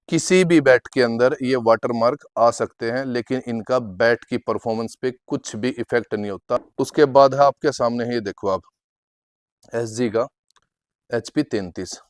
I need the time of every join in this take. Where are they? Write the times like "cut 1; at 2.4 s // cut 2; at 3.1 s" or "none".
cut 1; at 6.6 s